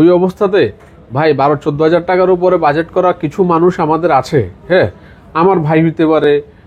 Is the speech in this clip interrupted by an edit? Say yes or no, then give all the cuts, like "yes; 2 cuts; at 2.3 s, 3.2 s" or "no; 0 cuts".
no; 0 cuts